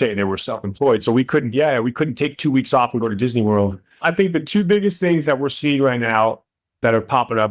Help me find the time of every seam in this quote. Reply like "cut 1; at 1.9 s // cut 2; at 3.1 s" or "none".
cut 1; at 4.0 s